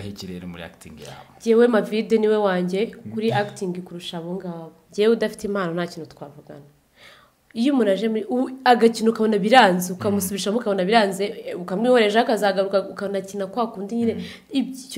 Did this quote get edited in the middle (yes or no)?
yes